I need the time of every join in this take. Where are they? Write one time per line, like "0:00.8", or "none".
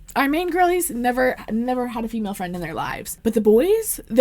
0:03.1